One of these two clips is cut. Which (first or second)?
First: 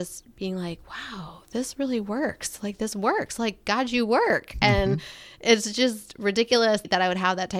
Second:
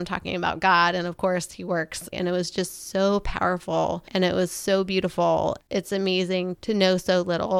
second